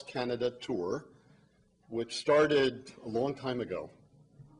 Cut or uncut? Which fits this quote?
uncut